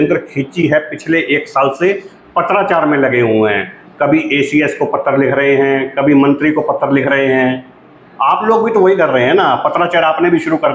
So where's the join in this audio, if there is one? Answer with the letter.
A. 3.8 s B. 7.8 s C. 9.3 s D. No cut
D